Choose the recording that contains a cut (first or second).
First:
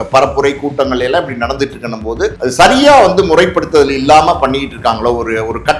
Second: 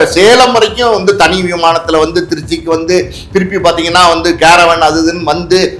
first